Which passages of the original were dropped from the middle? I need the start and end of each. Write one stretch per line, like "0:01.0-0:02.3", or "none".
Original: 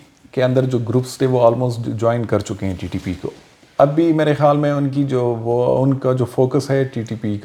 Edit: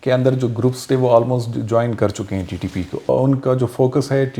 0:03.4-0:05.7